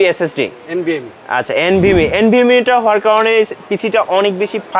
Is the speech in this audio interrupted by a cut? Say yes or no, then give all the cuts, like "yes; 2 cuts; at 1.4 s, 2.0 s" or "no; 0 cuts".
no; 0 cuts